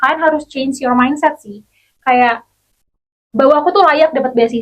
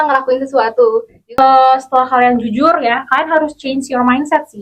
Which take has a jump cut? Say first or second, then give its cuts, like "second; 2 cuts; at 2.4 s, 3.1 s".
second; 1 cut; at 1.2 s